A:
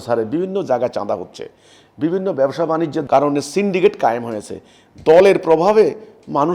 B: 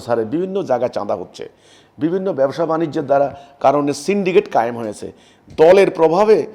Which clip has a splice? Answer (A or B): A